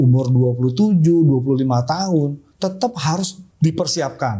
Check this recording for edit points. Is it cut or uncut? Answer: cut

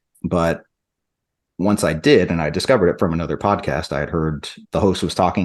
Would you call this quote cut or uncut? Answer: uncut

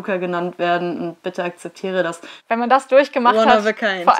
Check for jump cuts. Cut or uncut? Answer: cut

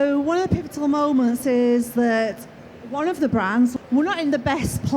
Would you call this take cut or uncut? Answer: cut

